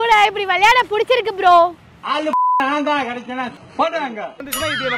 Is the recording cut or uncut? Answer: uncut